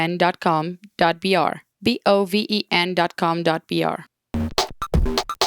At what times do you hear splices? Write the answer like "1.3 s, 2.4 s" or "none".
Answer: 1.7 s, 4.0 s